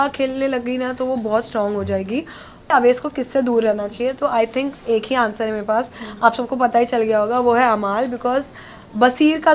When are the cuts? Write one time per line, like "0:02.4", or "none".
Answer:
0:02.7